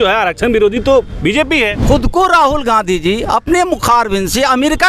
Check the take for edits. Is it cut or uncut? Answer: cut